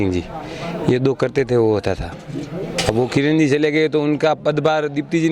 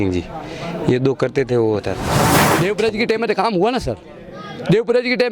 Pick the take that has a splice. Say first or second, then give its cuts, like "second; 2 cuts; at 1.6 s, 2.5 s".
second; 1 cut; at 2.4 s